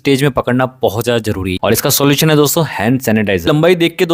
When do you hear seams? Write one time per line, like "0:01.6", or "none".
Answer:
0:01.5
0:03.4